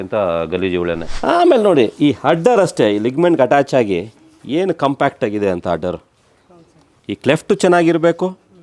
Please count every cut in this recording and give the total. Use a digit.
1